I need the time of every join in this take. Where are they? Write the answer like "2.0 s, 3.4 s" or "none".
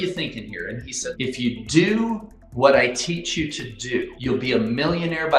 1.1 s, 4.1 s